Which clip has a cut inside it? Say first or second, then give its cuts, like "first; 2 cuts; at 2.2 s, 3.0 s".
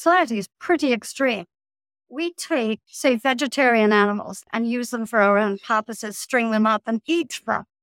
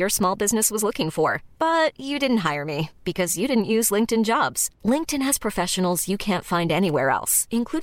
first; 2 cuts; at 2.9 s, 4.4 s